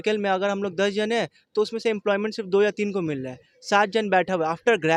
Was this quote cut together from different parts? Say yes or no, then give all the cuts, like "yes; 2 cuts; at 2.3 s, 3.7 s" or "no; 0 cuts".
no; 0 cuts